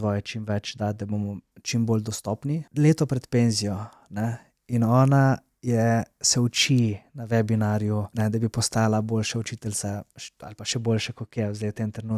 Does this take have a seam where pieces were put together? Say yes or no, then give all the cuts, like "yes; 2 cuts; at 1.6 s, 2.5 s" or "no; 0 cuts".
yes; 2 cuts; at 2.7 s, 8.1 s